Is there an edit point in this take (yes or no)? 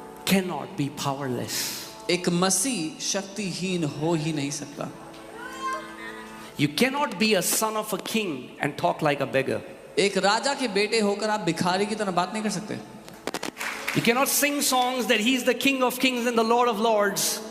yes